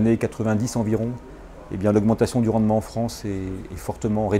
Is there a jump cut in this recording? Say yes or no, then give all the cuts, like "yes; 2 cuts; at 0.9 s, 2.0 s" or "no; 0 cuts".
no; 0 cuts